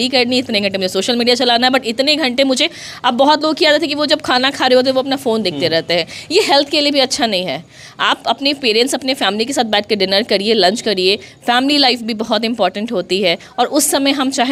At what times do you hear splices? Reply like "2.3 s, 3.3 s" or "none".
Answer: none